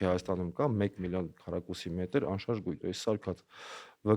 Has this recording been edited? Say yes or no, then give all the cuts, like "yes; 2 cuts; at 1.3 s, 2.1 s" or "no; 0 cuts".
yes; 1 cut; at 2.7 s